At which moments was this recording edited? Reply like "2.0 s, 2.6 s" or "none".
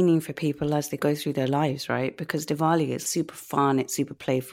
1.0 s, 3.0 s